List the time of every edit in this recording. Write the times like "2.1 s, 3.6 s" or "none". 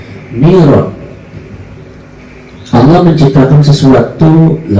2.2 s